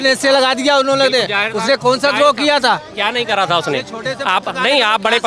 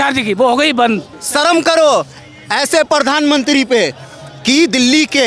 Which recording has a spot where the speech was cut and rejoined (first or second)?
second